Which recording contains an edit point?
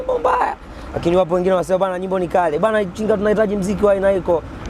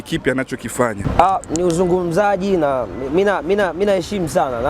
second; 1 cut; at 1.0 s

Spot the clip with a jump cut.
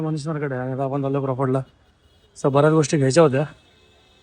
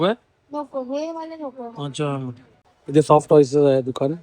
second; 1 cut; at 2.7 s

